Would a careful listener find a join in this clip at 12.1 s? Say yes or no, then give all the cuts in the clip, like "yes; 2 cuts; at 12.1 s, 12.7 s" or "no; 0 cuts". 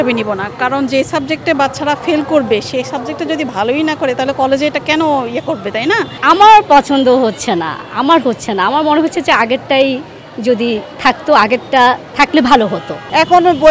no; 1 cut; at 6.1 s